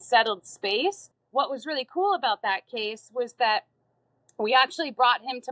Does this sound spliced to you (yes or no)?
yes